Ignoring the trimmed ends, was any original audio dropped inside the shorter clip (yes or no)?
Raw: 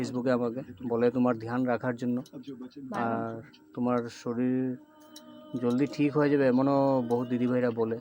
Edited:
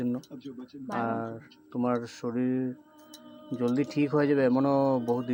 no